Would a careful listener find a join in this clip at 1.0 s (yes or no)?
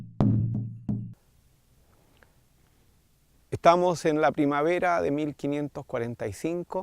yes